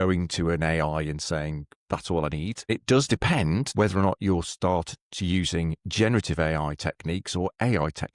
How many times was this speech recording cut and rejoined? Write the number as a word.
two